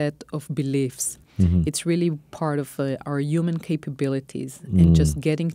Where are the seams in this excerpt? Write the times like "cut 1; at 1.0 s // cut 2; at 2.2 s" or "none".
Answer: cut 1; at 1.2 s